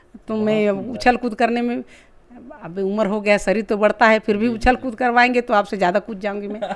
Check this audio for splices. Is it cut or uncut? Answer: uncut